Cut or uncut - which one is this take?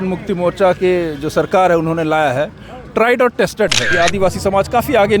cut